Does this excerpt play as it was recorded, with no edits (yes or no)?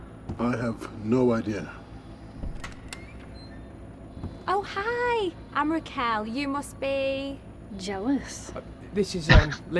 yes